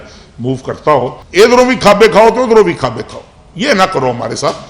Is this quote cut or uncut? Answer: cut